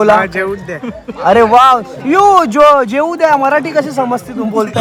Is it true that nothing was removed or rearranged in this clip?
yes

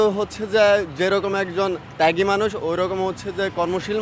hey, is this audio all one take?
yes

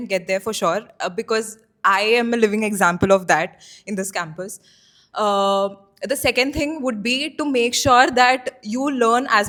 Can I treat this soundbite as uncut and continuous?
yes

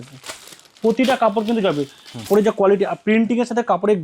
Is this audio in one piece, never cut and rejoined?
no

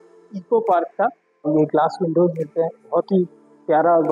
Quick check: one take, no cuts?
no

